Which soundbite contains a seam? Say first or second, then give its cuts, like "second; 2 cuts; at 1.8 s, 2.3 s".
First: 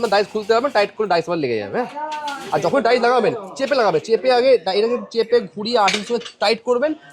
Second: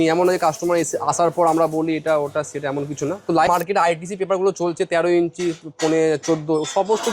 second; 1 cut; at 3.5 s